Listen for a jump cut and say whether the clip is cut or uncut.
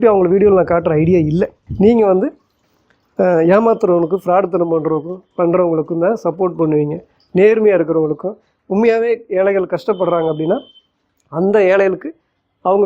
cut